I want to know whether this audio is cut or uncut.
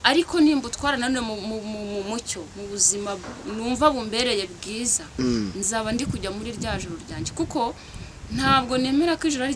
uncut